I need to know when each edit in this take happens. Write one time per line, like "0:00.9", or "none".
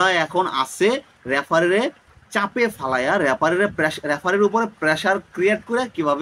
none